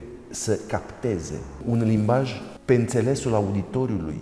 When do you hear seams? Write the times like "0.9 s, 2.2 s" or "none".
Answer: 1.5 s, 2.5 s

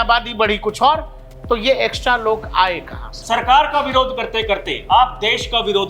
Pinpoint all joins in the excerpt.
3.2 s

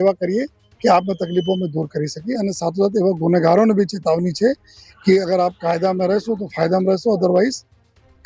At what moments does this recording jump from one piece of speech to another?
2.4 s

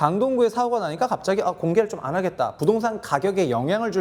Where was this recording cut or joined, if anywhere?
none

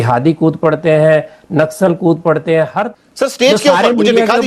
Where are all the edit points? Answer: 2.8 s

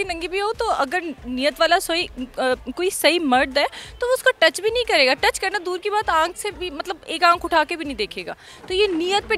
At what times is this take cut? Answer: none

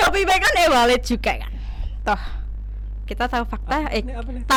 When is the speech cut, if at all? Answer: none

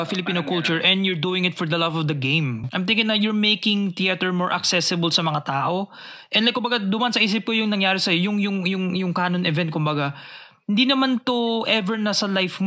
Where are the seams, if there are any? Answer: 2.6 s

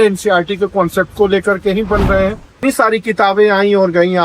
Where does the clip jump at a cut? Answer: 2.6 s

